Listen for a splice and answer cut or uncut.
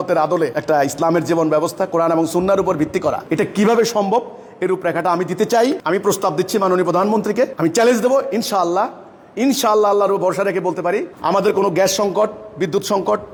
uncut